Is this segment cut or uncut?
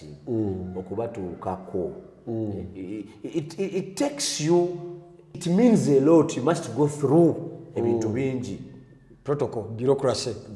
uncut